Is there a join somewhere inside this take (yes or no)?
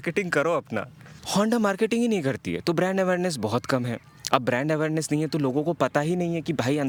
no